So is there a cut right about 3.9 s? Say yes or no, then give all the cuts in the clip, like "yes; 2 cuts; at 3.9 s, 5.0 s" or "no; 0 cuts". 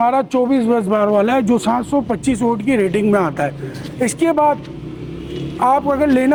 no; 0 cuts